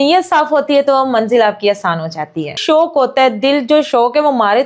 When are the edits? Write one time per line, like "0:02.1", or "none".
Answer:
0:02.5